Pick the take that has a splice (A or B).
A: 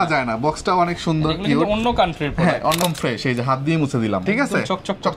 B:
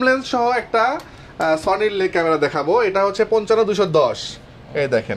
A